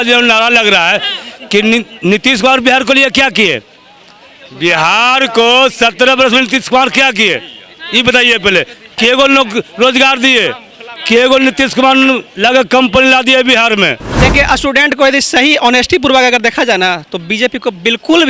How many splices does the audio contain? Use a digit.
1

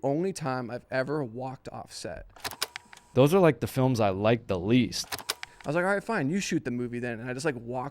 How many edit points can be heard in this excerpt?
2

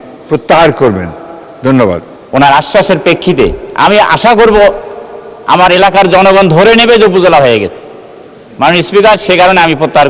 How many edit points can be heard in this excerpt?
1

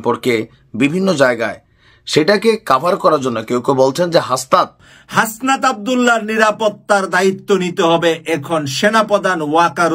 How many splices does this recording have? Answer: 1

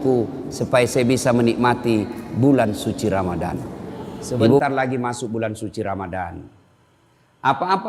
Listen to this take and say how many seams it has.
1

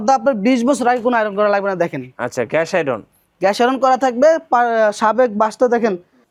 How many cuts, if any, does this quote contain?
0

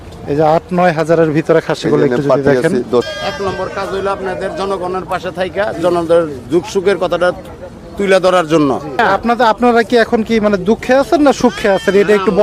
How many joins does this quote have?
2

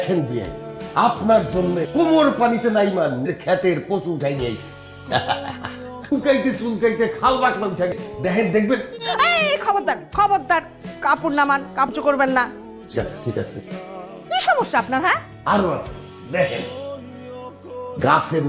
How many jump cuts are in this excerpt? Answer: 0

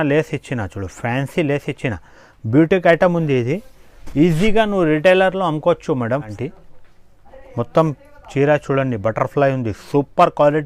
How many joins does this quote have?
1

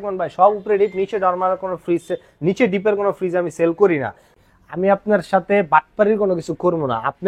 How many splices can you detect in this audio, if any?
1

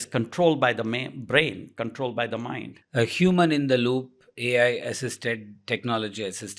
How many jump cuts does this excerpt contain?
1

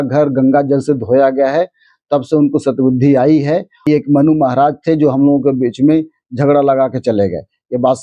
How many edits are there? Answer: 1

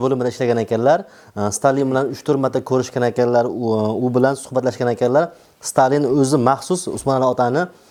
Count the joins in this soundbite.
0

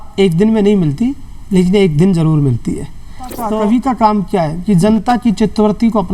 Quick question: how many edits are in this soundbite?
1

